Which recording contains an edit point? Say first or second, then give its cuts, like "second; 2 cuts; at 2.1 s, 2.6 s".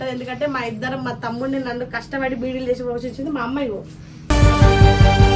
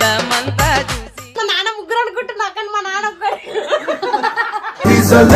second; 1 cut; at 1.4 s